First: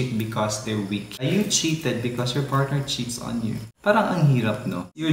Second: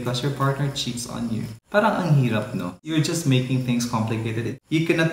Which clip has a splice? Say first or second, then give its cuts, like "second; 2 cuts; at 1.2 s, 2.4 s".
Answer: first; 1 cut; at 1.1 s